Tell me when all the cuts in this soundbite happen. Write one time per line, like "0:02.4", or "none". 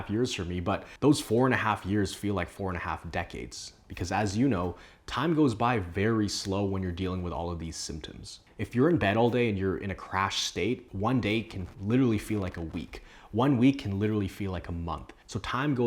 0:08.5

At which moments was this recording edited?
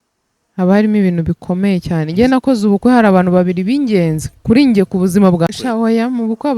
0:05.5

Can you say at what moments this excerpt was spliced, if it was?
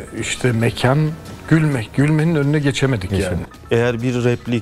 0:03.5

